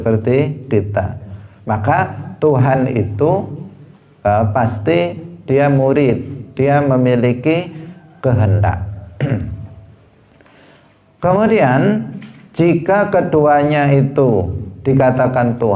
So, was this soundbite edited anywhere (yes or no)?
no